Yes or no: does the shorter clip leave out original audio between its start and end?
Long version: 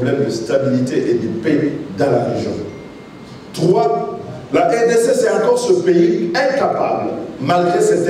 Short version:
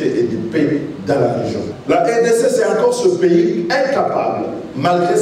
yes